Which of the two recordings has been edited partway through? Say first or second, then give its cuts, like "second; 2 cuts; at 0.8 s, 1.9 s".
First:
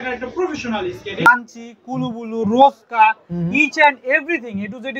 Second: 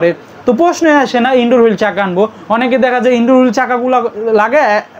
first; 1 cut; at 1.3 s